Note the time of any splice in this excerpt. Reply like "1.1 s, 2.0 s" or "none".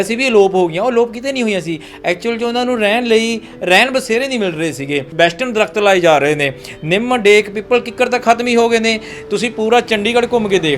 5.1 s